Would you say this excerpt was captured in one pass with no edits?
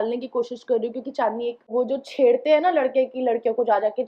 no; 1 cut; at 1.7 s

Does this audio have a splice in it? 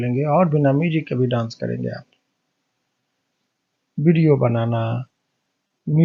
no; 0 cuts

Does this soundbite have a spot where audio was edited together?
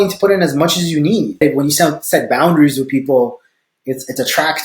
yes; 1 cut; at 1.4 s

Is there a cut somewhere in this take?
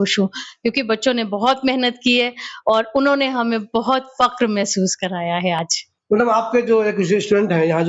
no; 0 cuts

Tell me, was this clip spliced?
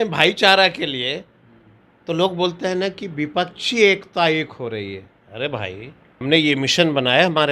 yes; 1 cut; at 6.2 s

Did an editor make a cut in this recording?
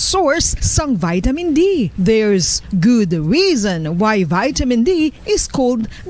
yes; 1 cut; at 2.5 s

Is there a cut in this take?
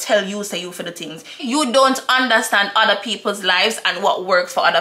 yes; 1 cut; at 1.3 s

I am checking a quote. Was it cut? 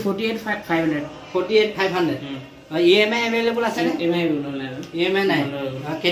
no; 0 cuts

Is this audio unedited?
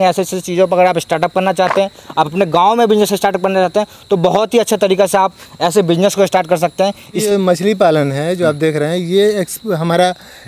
yes; 0 cuts

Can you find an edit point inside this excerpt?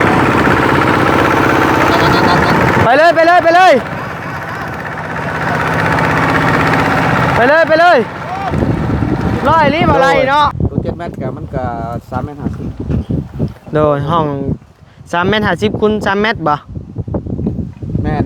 yes; 1 cut; at 10.5 s

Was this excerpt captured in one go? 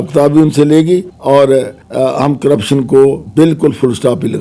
no; 3 cuts; at 1.1 s, 1.8 s, 3.2 s

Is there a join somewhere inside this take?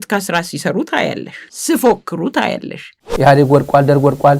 yes; 1 cut; at 3.0 s

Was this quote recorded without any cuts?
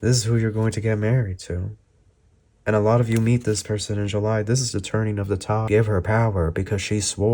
no; 1 cut; at 5.6 s

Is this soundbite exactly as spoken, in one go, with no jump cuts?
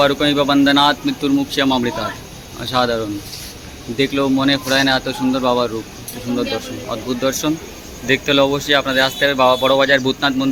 yes; 0 cuts

